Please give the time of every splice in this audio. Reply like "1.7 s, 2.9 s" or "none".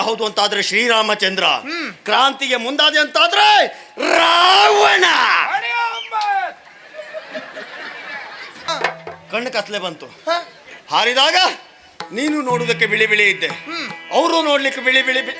8.7 s

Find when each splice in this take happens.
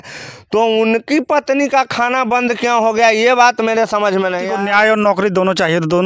4.5 s

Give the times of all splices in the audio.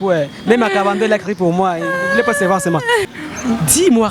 3.1 s

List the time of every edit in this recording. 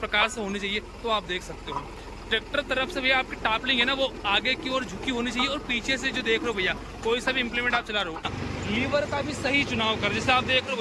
8.3 s

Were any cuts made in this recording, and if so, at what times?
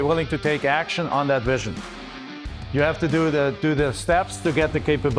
none

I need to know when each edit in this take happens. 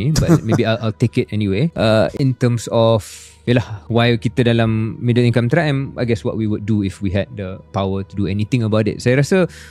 none

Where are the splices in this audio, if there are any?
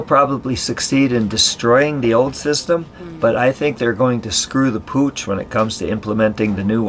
none

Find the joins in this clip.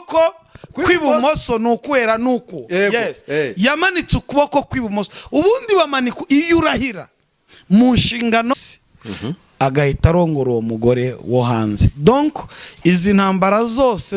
8.5 s

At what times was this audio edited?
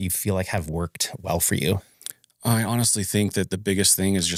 none

